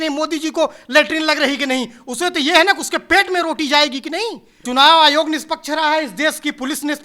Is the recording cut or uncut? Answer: cut